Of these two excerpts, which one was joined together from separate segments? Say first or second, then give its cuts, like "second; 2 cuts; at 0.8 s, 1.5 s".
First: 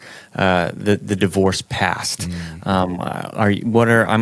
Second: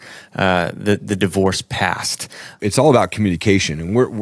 second; 1 cut; at 2.5 s